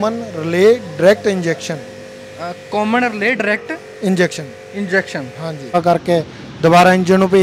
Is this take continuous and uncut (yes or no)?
no